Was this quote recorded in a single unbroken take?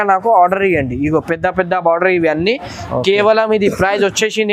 yes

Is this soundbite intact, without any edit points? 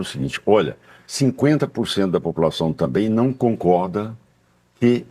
yes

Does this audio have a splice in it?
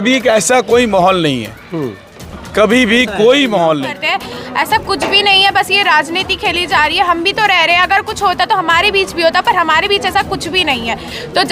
yes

